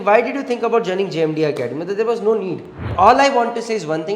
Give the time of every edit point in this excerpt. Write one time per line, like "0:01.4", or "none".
0:02.8